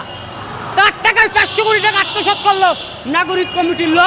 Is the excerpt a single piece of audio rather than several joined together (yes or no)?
yes